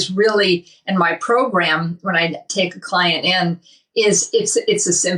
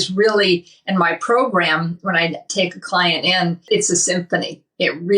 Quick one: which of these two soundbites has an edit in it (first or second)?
second